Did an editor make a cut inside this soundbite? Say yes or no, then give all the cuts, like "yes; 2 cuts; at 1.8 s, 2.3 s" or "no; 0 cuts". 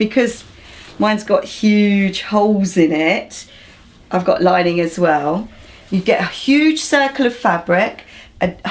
yes; 1 cut; at 4.1 s